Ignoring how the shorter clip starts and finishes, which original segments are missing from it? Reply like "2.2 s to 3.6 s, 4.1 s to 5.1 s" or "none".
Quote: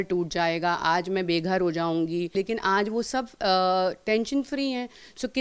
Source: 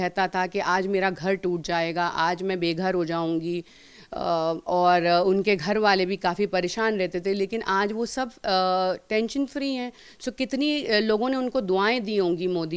3.7 s to 7.4 s